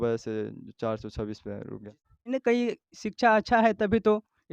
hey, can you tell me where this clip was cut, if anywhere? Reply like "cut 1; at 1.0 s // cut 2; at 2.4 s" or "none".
cut 1; at 2.3 s